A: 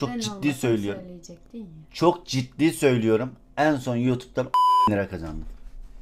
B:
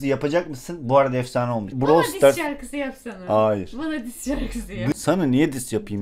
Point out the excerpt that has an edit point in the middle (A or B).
B